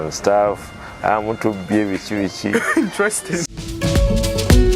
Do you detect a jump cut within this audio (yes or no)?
no